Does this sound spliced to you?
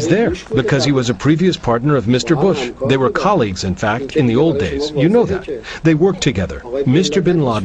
no; 0 cuts

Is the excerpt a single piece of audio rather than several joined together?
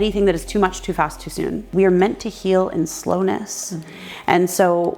no; 1 cut; at 1.7 s

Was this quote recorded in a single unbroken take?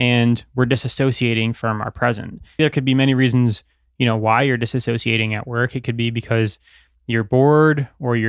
no; 1 cut; at 2.6 s

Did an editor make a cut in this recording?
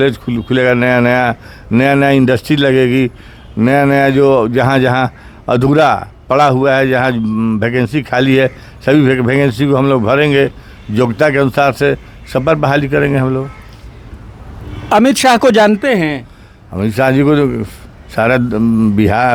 no; 0 cuts

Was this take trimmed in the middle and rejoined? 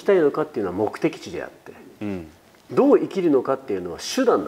no; 0 cuts

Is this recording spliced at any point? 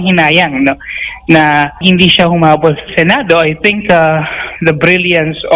yes; 1 cut; at 1.8 s

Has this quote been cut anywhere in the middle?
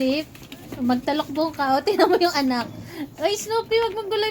no; 0 cuts

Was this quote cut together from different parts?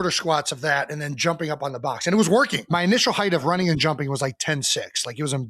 yes; 1 cut; at 2.6 s

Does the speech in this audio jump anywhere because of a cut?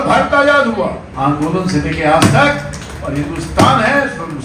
yes; 1 cut; at 1.1 s

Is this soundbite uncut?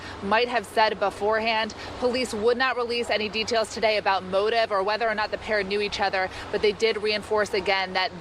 no; 1 cut; at 1.8 s

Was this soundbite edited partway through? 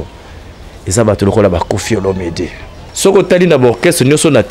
yes; 1 cut; at 2.8 s

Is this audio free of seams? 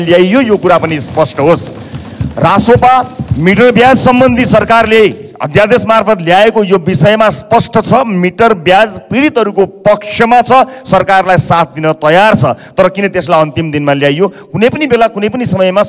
yes; 0 cuts

